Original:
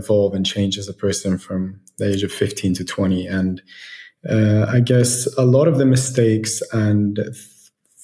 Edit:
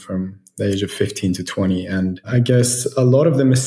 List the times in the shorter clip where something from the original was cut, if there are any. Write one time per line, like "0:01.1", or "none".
0:02.3